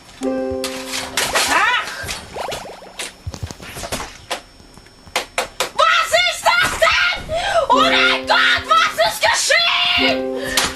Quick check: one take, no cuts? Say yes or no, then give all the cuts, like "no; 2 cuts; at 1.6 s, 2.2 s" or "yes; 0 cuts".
no; 1 cut; at 0.9 s